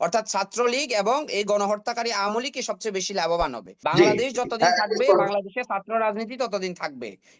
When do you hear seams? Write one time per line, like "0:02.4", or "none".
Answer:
0:03.7